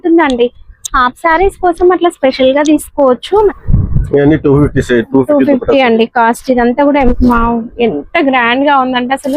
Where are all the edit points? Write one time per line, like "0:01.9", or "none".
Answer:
0:03.5
0:07.1

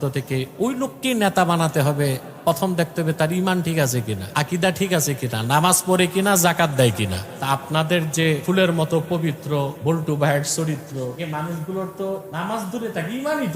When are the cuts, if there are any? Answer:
0:04.2
0:07.3
0:08.4
0:09.8
0:11.1
0:12.3

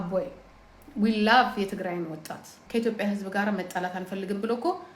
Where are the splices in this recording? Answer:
0:02.5

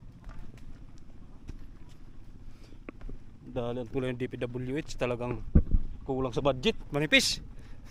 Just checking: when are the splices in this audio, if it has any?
none

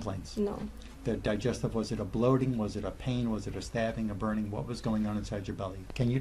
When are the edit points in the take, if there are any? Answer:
none

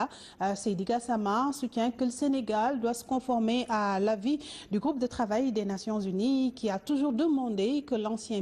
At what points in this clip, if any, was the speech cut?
none

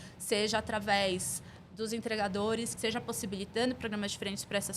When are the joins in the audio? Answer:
0:02.7

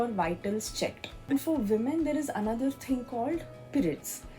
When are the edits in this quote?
0:01.3

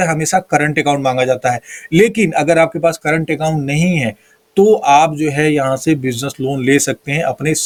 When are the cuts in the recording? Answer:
none

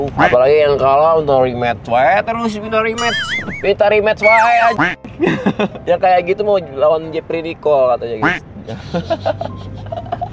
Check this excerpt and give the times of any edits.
none

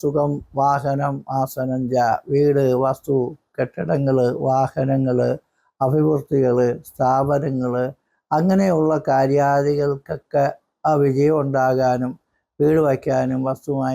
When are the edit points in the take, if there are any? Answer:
none

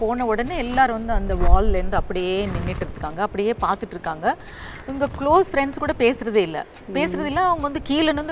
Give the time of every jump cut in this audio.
none

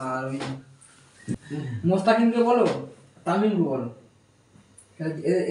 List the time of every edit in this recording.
0:01.3

